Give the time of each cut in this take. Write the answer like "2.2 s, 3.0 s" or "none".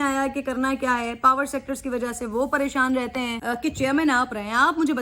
3.4 s